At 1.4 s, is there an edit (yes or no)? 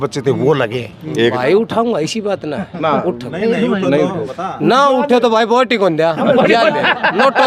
yes